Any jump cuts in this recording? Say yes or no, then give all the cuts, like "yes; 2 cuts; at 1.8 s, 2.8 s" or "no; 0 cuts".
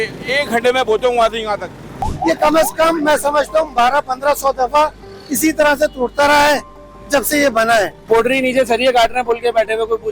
yes; 2 cuts; at 2.0 s, 8.0 s